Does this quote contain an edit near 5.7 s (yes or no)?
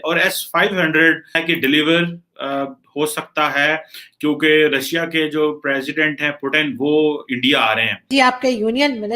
no